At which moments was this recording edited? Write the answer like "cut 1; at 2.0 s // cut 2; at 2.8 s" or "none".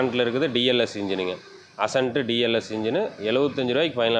none